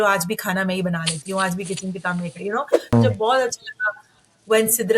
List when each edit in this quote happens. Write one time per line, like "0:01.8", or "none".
0:02.9